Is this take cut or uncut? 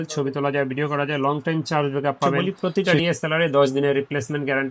cut